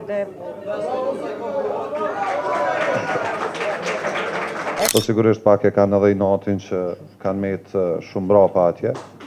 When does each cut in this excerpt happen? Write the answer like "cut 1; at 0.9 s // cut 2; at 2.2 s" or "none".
cut 1; at 4.9 s